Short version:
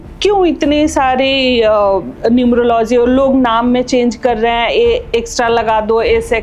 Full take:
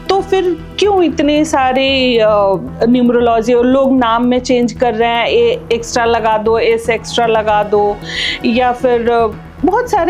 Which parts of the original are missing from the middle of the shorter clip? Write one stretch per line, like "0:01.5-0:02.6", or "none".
none